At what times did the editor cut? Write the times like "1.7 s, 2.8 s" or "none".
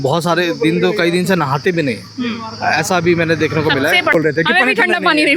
4.1 s